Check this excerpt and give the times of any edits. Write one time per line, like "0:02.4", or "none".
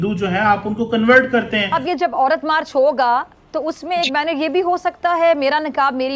0:01.8